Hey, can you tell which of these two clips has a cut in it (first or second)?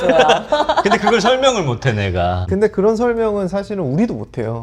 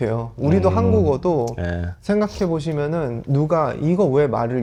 first